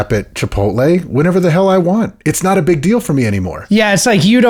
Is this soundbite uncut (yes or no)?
yes